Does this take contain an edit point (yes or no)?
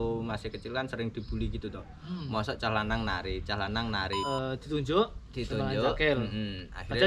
yes